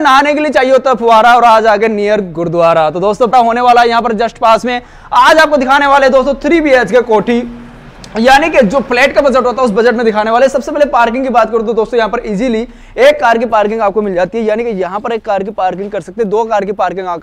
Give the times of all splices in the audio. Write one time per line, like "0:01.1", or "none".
0:03.3